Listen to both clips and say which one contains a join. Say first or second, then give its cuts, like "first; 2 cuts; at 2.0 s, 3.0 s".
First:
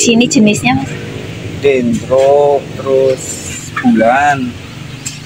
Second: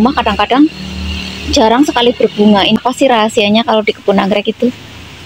second; 1 cut; at 2.8 s